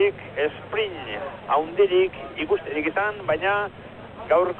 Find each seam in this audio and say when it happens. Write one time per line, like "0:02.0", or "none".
none